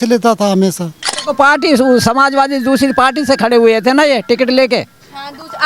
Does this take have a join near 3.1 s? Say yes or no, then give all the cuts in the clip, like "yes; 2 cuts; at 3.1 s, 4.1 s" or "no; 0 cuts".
no; 1 cut; at 1.2 s